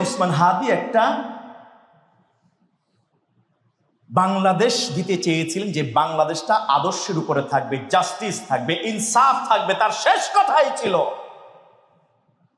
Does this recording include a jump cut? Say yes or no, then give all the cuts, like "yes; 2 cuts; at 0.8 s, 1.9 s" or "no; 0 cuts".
no; 0 cuts